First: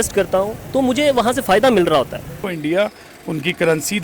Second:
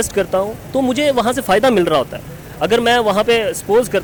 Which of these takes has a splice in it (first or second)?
first